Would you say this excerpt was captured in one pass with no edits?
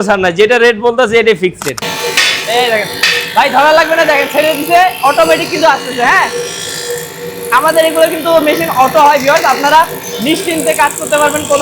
no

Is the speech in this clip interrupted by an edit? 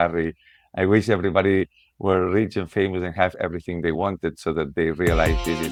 no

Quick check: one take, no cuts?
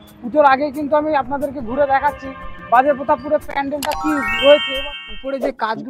no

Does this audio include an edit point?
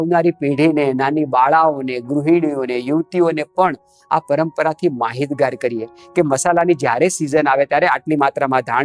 no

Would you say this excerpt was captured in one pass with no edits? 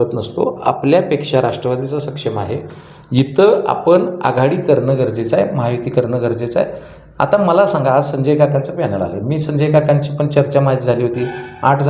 yes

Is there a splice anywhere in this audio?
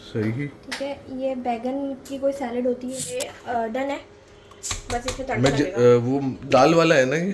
yes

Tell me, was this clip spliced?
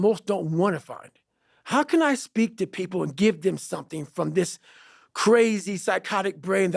no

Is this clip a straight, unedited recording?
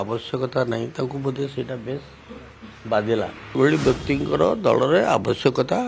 no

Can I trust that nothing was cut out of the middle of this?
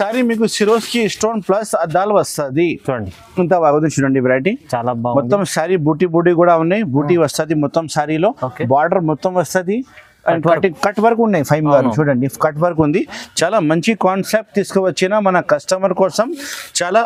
yes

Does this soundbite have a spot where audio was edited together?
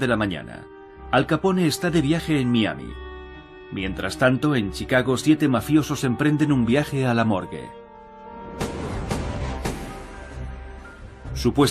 yes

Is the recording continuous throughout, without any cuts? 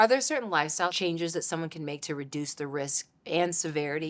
no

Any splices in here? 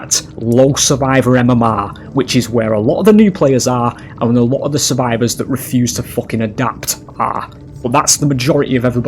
yes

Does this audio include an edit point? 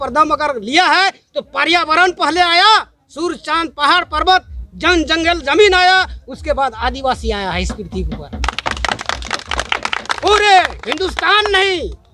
no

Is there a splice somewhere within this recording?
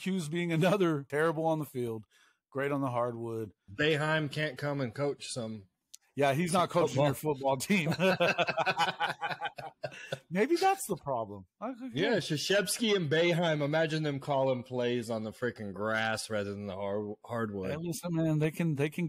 yes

